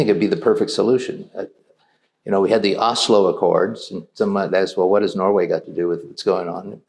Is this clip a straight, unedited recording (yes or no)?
yes